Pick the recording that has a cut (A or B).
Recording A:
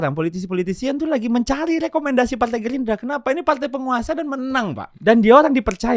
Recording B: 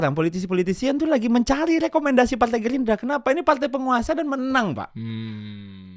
A